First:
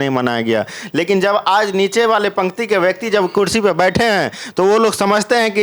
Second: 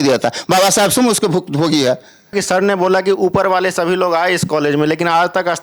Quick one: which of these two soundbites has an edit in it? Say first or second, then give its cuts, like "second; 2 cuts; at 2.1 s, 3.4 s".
second; 1 cut; at 2.3 s